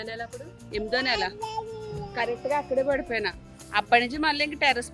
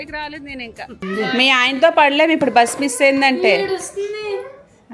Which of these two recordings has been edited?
second; 1 cut; at 1.0 s

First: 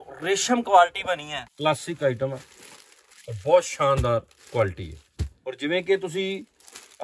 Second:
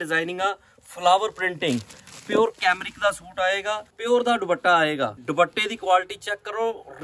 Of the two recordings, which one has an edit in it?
first; 1 cut; at 1.3 s

